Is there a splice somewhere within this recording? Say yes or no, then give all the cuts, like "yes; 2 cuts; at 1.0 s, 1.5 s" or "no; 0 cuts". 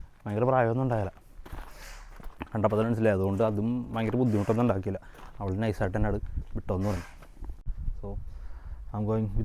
yes; 1 cut; at 7.7 s